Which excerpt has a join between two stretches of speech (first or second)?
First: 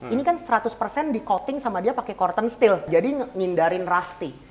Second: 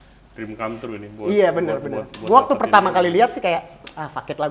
first